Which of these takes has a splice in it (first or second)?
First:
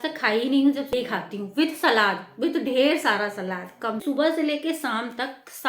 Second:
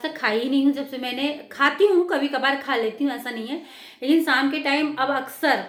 first